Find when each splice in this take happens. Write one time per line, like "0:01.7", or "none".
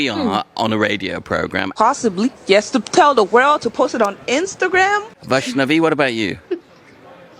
0:01.7
0:05.1